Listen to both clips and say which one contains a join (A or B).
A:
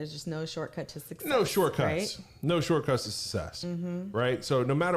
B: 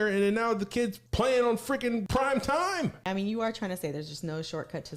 B